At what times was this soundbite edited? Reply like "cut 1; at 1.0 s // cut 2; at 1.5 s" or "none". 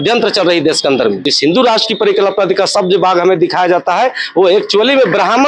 cut 1; at 1.3 s